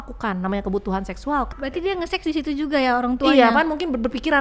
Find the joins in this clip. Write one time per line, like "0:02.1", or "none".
0:01.5